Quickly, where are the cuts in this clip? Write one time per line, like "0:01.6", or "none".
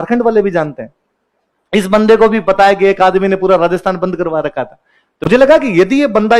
0:05.4